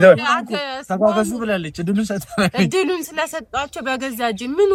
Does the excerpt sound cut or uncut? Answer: uncut